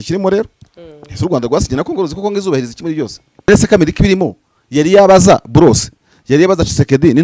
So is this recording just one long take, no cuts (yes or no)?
no